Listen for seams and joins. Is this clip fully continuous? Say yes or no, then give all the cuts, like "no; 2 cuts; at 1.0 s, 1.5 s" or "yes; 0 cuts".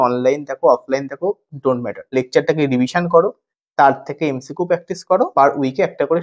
no; 2 cuts; at 2.0 s, 5.3 s